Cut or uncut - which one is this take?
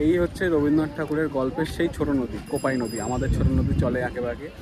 uncut